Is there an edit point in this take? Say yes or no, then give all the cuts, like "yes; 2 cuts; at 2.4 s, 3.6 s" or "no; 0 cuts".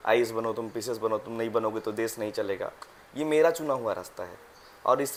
no; 0 cuts